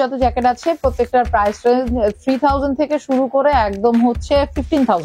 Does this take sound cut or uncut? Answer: uncut